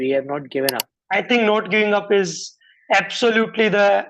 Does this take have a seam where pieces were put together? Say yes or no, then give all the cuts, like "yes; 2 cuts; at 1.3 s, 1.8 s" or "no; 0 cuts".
yes; 1 cut; at 0.9 s